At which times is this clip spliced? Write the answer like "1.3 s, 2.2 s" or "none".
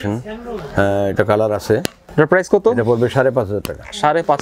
2.0 s